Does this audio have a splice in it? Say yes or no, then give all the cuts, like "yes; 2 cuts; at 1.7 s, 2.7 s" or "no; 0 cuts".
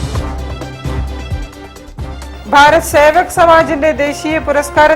yes; 1 cut; at 2.0 s